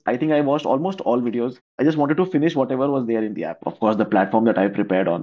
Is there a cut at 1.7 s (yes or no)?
yes